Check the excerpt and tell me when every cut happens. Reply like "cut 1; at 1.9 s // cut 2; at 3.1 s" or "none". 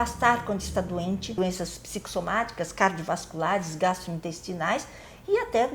cut 1; at 1.4 s